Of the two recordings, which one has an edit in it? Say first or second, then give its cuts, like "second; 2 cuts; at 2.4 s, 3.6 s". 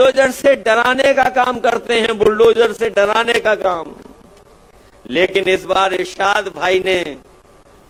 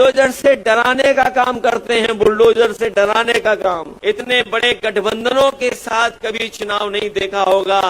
second; 1 cut; at 3.9 s